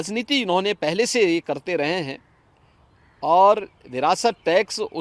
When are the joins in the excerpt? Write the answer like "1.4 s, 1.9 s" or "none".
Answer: none